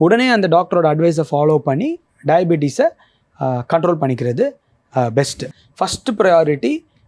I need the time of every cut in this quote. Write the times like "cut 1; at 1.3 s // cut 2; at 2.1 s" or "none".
cut 1; at 5.5 s